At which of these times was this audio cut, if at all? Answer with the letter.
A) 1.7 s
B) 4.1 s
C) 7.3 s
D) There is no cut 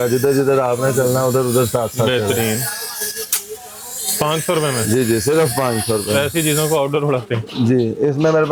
D